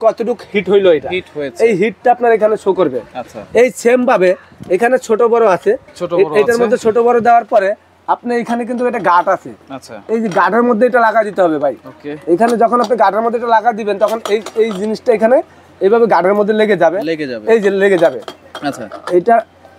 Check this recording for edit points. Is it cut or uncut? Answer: uncut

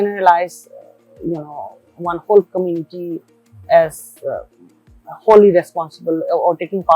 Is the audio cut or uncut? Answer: uncut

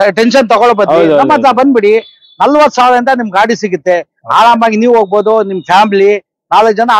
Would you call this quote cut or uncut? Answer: uncut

